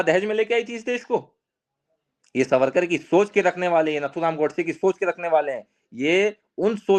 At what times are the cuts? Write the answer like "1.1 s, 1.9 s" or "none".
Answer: none